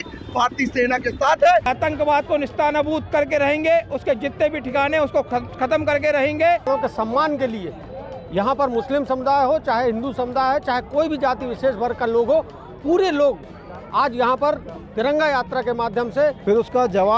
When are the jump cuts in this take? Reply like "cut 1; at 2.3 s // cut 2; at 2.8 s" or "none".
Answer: cut 1; at 1.7 s // cut 2; at 6.7 s // cut 3; at 16.4 s